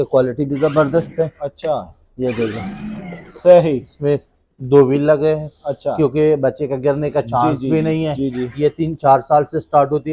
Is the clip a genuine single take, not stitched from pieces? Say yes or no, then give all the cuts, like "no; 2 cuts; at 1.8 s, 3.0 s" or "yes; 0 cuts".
yes; 0 cuts